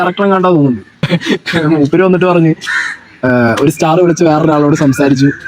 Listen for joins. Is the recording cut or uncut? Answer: cut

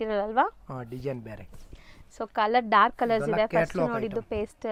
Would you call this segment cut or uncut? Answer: uncut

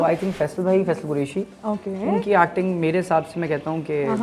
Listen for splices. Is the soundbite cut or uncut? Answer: uncut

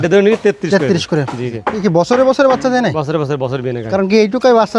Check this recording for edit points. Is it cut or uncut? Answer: cut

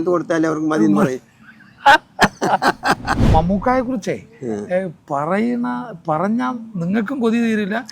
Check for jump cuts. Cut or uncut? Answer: cut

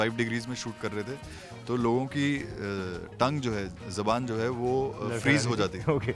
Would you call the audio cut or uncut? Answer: uncut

